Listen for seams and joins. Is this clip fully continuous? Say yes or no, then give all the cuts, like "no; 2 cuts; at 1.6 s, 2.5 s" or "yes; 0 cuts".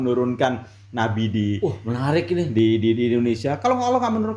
yes; 0 cuts